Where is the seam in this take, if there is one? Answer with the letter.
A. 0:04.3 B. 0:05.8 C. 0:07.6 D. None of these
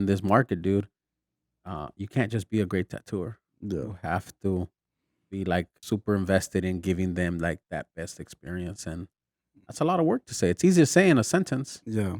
B